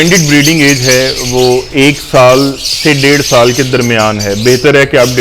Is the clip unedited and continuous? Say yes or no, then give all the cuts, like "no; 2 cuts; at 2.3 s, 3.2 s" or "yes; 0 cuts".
yes; 0 cuts